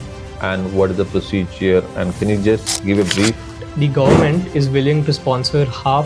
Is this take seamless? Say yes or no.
no